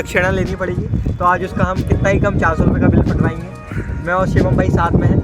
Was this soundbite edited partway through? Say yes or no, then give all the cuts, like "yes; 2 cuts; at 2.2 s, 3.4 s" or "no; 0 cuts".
no; 0 cuts